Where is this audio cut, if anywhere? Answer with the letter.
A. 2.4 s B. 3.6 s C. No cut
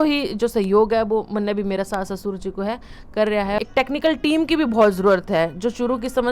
B